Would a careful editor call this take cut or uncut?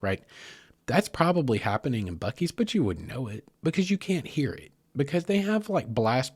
uncut